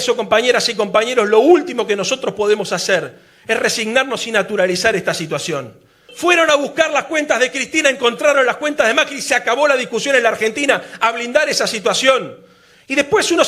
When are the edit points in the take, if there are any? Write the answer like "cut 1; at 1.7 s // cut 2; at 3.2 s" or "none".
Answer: cut 1; at 6.1 s